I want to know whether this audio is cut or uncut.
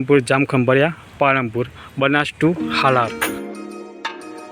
cut